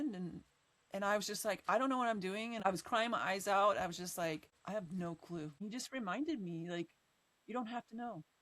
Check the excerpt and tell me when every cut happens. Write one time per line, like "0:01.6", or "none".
0:02.6
0:04.5
0:05.6